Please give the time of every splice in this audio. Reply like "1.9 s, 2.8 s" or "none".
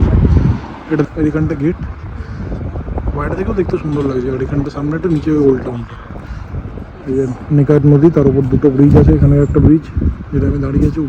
1.0 s